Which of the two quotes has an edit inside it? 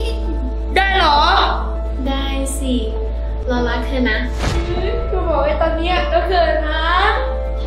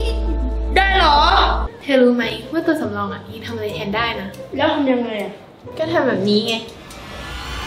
second; 1 cut; at 1.7 s

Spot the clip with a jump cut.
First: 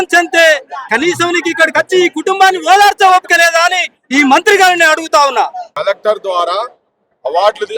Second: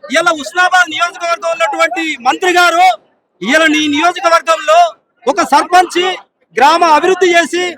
first; 1 cut; at 5.6 s

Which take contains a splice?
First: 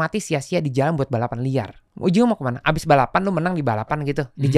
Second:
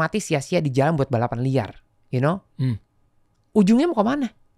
first; 1 cut; at 1.8 s

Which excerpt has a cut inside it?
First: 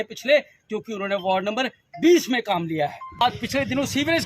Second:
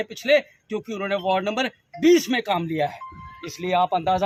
first; 1 cut; at 3.2 s

